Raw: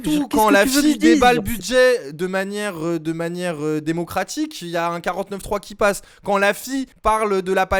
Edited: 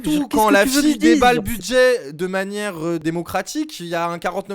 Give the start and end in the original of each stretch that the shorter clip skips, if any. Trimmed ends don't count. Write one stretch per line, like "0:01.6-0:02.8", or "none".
0:03.1-0:03.9